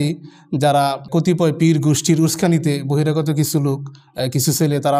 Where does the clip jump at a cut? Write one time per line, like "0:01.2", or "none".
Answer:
0:01.0